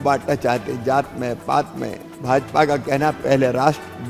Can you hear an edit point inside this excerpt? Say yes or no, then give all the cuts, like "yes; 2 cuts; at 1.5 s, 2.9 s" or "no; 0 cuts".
no; 0 cuts